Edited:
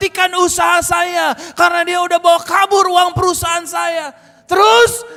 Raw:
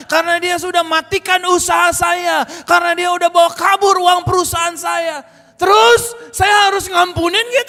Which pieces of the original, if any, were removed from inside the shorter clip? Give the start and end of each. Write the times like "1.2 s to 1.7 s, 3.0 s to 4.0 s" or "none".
none

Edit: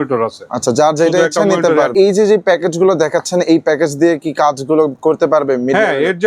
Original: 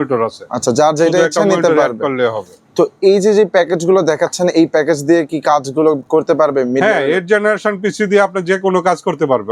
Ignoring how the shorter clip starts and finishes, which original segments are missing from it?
1.9 s to 3.0 s

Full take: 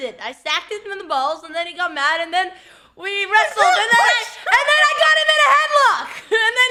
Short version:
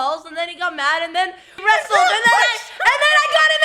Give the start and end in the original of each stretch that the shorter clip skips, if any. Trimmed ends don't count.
2.7 s to 3.2 s

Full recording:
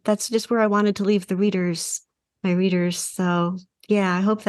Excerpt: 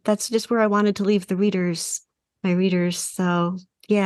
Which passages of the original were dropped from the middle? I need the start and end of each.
none

